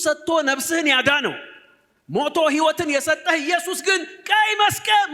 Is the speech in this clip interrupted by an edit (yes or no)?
no